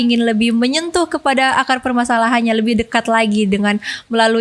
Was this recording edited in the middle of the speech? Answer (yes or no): no